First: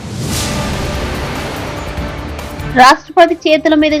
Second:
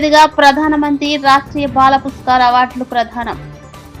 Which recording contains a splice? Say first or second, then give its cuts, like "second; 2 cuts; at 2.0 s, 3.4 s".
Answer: first; 1 cut; at 2.5 s